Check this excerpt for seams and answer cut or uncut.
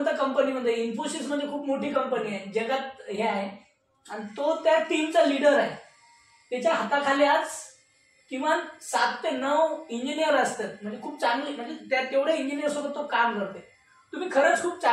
uncut